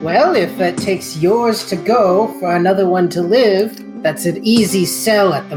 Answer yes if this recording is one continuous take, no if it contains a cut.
yes